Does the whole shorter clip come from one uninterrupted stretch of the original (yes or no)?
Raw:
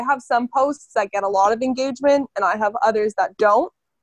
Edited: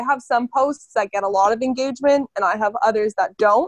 yes